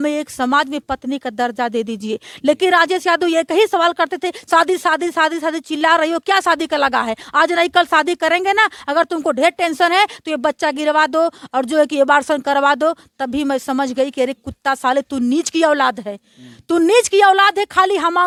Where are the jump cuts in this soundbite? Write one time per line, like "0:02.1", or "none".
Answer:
none